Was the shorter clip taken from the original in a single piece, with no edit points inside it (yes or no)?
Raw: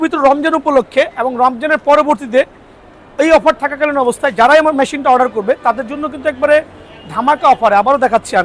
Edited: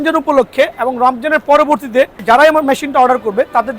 no